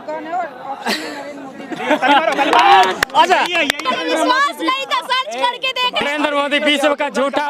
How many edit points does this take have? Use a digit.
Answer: 2